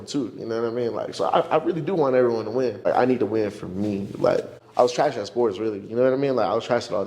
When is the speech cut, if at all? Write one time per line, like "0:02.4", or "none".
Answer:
0:02.9
0:04.6